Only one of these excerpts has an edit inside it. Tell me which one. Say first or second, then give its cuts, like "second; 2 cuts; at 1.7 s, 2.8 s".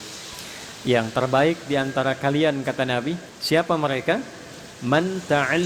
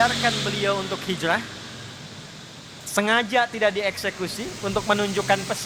first; 1 cut; at 3.3 s